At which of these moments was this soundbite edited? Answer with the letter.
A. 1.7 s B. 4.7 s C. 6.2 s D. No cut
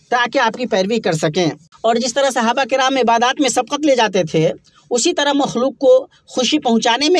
A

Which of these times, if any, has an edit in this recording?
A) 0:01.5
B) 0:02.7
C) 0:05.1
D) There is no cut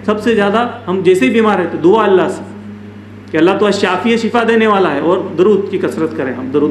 D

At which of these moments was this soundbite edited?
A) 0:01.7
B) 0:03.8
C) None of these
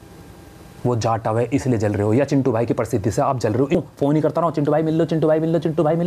B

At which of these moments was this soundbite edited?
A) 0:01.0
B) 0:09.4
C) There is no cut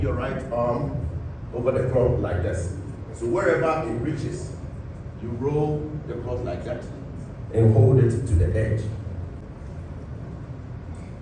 C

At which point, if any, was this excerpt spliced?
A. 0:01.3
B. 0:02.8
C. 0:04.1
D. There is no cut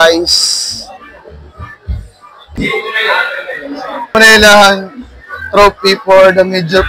C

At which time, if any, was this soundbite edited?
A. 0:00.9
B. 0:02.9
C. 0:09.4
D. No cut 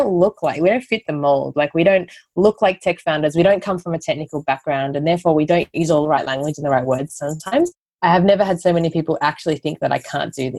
D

